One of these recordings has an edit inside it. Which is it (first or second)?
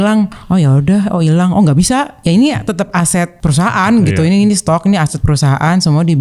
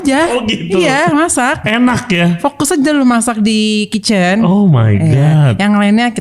first